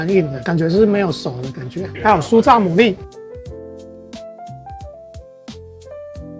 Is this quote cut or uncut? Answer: uncut